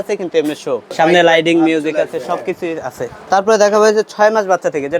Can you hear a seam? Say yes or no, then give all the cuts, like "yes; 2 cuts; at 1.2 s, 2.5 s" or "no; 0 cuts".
yes; 2 cuts; at 1.0 s, 3.1 s